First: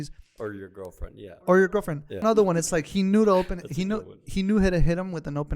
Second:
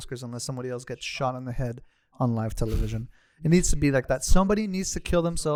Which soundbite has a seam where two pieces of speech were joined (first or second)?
first